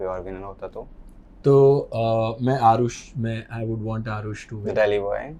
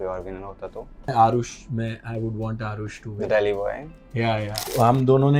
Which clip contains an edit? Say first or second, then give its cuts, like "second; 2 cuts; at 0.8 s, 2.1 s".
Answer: second; 2 cuts; at 1.1 s, 4.6 s